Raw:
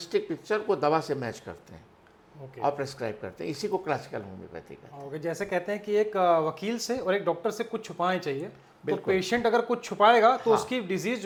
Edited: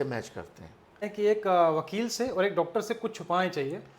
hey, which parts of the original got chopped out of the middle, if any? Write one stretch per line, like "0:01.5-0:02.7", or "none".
0:02.2-0:05.8

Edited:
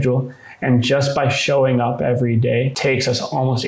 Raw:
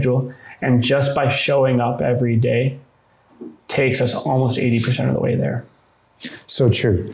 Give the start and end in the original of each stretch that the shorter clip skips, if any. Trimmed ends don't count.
0:02.7-0:03.7

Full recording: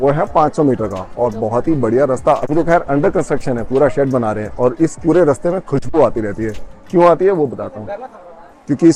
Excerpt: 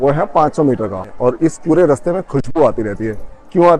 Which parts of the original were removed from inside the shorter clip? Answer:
0:01.1-0:04.4

